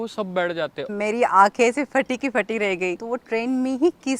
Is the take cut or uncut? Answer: cut